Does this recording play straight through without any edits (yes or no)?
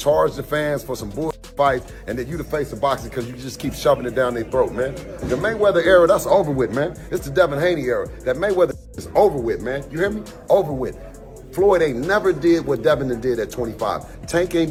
yes